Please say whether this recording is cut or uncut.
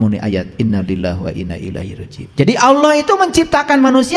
cut